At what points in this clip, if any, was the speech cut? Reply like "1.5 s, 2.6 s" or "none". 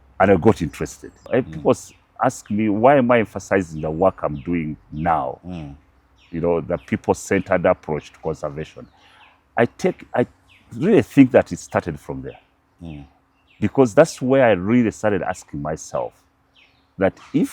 1.2 s